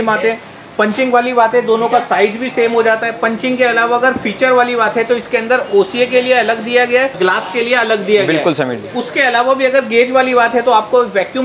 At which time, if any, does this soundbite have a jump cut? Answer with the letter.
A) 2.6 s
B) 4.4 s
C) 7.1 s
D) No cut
C